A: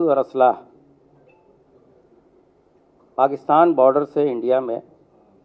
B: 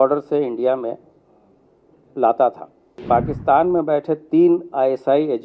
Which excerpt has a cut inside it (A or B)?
B